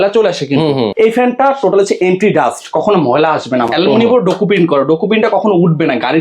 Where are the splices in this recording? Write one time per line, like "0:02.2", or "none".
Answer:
0:00.9
0:03.7